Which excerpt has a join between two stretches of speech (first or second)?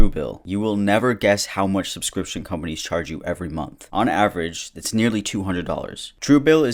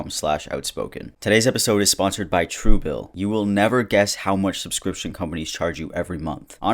second